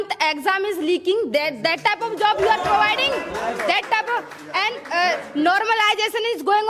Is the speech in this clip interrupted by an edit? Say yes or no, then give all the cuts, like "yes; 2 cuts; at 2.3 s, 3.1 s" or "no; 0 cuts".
no; 0 cuts